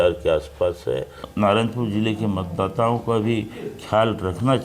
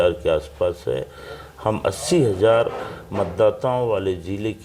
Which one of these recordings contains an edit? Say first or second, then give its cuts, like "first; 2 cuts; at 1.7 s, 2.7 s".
first; 1 cut; at 1.2 s